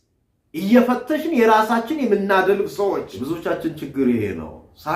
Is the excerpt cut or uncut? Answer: cut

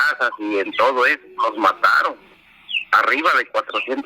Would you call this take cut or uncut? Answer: cut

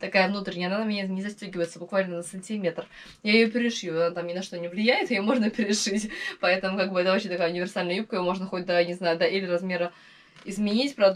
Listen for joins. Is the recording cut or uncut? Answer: uncut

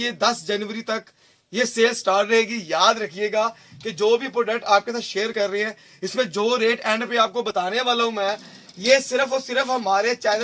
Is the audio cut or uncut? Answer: uncut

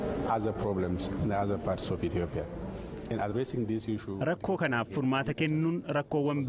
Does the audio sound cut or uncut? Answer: uncut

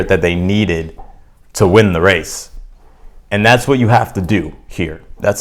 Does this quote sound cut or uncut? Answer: uncut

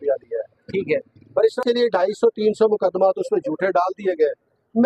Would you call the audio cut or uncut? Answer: cut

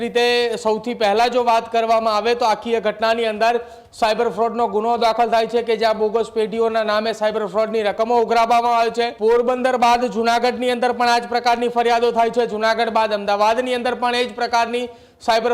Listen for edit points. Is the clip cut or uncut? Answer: cut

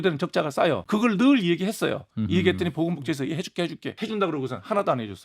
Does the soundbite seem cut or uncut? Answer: cut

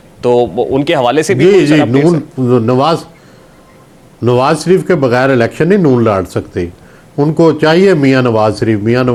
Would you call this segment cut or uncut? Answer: uncut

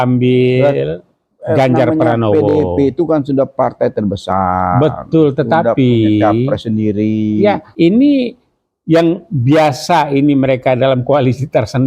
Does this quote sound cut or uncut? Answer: cut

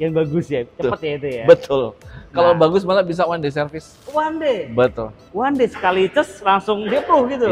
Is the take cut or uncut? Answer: uncut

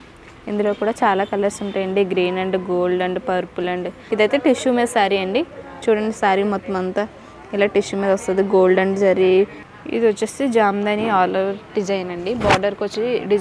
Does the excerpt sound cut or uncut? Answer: cut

